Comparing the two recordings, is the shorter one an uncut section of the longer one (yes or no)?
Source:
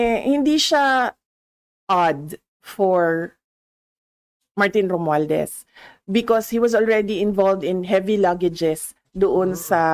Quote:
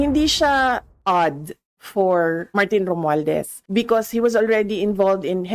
no